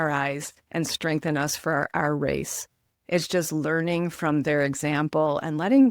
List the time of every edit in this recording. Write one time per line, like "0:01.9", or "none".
none